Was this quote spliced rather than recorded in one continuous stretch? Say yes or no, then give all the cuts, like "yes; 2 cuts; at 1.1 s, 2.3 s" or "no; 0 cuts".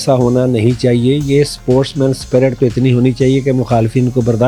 no; 0 cuts